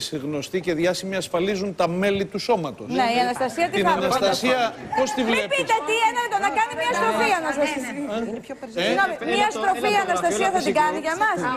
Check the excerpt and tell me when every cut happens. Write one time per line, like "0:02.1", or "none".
0:04.6